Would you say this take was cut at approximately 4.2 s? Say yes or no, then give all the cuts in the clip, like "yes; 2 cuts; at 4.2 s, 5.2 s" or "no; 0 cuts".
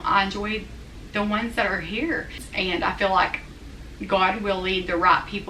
no; 1 cut; at 2.4 s